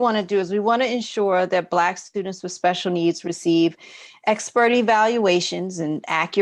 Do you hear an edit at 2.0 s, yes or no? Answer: no